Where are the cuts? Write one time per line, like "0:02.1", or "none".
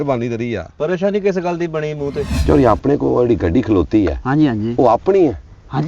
0:02.2